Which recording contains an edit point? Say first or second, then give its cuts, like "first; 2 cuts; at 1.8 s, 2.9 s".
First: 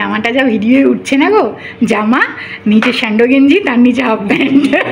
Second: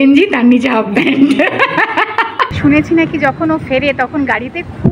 second; 1 cut; at 2.5 s